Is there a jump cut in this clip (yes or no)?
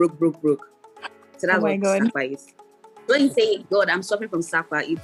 no